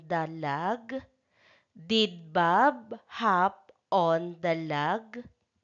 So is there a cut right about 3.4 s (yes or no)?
no